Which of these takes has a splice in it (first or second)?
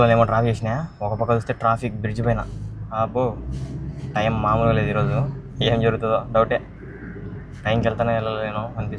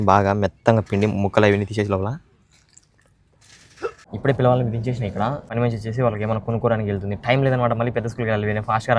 second